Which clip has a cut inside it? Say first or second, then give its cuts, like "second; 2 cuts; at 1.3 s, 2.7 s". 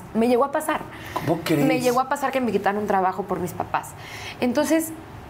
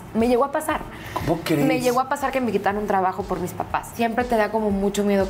second; 1 cut; at 3.9 s